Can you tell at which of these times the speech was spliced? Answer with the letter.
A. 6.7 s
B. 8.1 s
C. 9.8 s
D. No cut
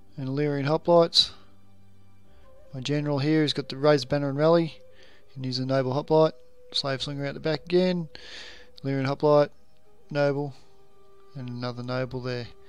D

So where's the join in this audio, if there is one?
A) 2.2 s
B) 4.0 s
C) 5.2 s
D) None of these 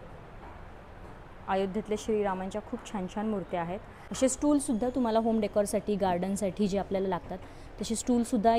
B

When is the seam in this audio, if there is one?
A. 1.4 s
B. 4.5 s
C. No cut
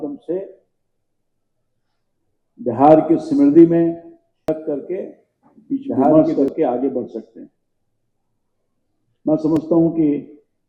B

